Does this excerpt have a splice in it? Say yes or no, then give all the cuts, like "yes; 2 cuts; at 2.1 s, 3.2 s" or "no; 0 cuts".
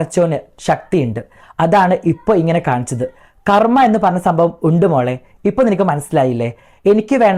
no; 0 cuts